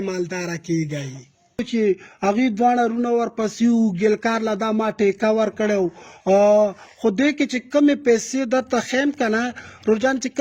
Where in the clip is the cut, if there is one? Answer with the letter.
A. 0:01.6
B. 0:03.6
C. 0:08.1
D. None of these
A